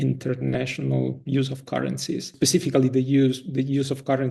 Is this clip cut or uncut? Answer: cut